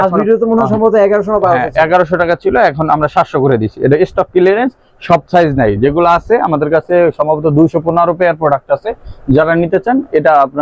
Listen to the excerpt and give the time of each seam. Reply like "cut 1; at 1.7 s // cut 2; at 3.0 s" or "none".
none